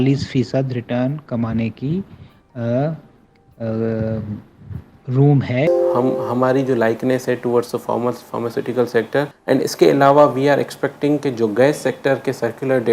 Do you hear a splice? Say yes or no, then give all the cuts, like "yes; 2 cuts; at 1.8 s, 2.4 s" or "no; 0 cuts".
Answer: yes; 2 cuts; at 5.7 s, 9.4 s